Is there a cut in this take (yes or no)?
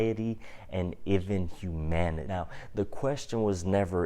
yes